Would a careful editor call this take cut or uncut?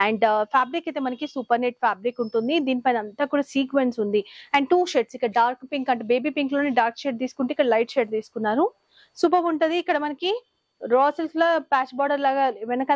uncut